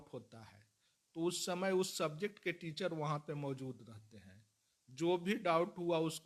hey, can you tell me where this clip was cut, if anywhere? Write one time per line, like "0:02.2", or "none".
none